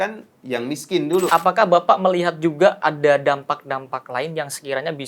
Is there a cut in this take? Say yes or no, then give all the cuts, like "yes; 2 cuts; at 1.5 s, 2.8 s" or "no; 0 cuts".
yes; 1 cut; at 1.3 s